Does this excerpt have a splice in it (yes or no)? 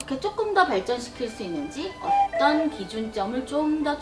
no